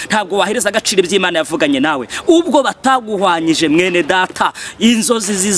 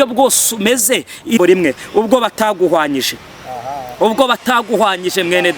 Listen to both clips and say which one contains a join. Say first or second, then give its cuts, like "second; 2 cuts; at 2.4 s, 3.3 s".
second; 1 cut; at 1.4 s